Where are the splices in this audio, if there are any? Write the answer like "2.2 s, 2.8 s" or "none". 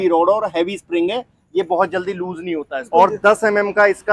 2.9 s